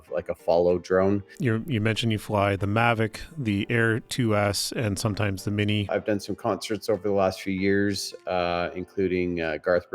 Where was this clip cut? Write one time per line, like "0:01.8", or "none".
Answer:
0:01.3
0:05.9